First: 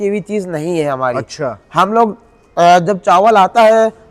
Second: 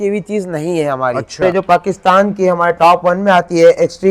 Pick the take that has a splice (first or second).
second